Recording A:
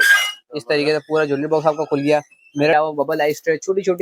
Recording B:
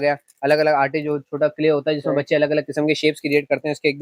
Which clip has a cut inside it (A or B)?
A